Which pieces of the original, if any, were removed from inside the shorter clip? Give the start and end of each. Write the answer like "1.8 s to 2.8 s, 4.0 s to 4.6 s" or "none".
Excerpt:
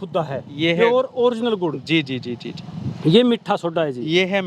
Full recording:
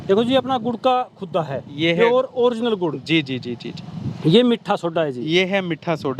none